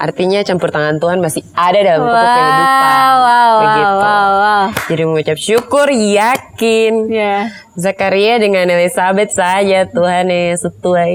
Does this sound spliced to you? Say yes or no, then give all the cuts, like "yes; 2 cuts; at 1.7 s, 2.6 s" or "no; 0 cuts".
no; 0 cuts